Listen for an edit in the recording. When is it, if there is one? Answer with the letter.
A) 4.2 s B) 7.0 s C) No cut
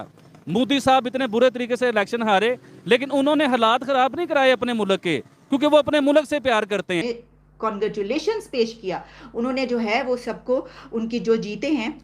B